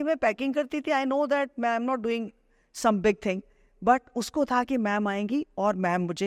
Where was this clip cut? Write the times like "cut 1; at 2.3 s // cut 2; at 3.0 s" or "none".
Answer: none